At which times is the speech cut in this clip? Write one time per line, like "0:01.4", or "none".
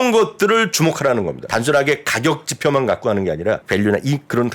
0:01.4
0:03.6